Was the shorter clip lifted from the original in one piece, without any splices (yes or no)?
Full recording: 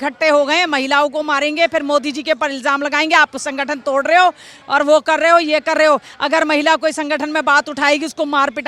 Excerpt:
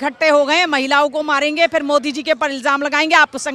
yes